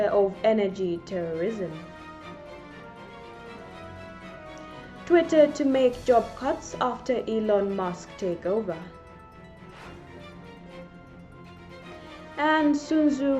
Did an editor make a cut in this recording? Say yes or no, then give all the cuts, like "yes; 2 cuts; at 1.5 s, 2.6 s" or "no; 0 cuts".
yes; 4 cuts; at 1.8 s, 5.1 s, 9.1 s, 12.3 s